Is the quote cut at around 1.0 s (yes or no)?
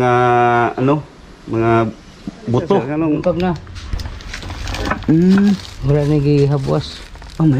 no